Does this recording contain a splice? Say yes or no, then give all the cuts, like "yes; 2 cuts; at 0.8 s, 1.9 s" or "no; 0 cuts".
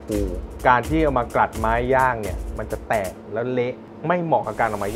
yes; 1 cut; at 3.9 s